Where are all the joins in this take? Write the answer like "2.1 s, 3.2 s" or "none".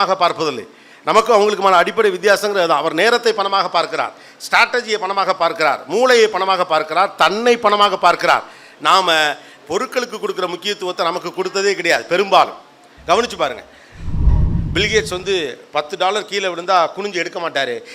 14.2 s